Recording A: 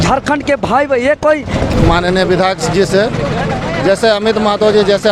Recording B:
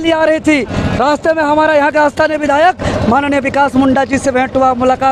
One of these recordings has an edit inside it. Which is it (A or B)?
A